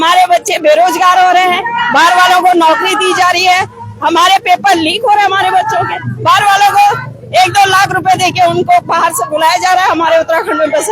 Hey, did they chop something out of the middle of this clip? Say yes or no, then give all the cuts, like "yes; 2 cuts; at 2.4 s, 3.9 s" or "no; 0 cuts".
no; 0 cuts